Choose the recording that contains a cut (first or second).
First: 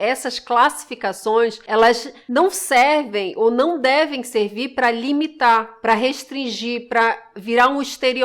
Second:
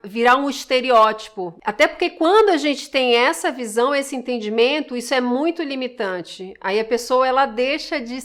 first